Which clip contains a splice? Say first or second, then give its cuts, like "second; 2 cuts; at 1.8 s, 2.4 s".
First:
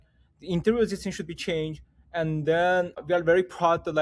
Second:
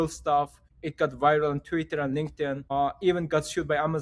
first; 1 cut; at 3.0 s